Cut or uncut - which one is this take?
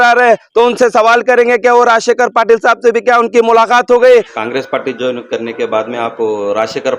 cut